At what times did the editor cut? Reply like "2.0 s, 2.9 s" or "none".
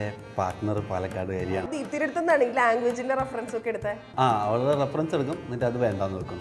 1.7 s, 4.1 s